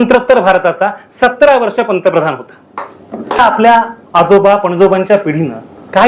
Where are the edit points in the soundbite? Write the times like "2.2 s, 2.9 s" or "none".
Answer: 3.4 s